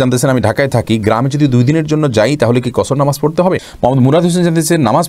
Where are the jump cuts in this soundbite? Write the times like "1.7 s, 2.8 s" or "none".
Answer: 3.7 s